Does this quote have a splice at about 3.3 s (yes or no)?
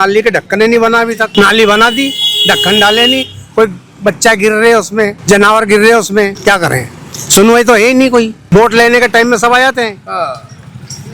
no